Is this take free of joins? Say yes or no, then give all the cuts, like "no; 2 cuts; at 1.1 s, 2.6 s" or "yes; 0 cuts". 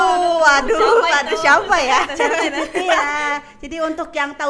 yes; 0 cuts